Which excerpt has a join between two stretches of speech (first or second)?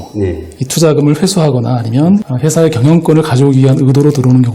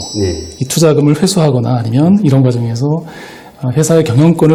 first